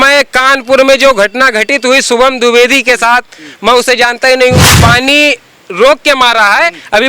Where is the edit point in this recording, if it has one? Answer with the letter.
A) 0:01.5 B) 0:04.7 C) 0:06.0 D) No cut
B